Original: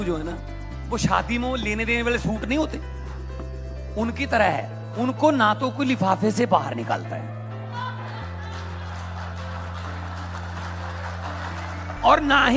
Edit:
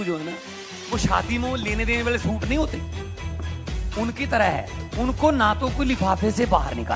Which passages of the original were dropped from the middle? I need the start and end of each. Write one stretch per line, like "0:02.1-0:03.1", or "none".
none